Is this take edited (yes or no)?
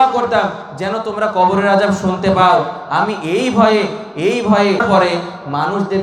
yes